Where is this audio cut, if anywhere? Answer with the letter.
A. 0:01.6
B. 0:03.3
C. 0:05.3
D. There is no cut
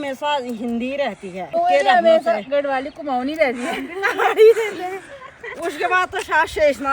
A